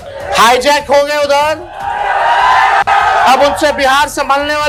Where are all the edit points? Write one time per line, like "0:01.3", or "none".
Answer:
none

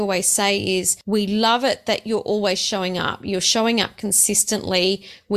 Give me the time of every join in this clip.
0:01.0

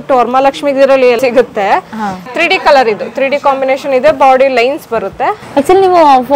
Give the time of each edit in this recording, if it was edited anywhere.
0:01.2
0:05.4

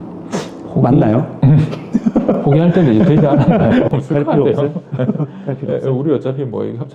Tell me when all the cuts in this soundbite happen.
0:04.0

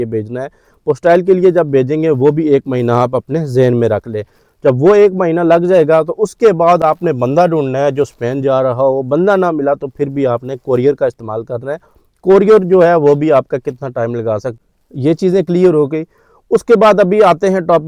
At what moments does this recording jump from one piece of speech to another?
none

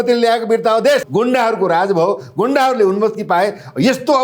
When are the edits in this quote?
0:01.1

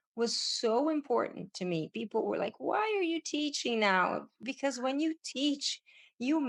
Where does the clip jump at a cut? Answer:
none

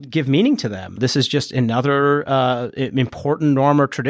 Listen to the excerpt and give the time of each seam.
0:01.0

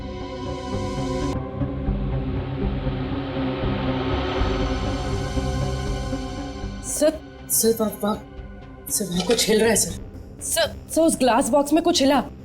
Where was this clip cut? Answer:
0:01.3

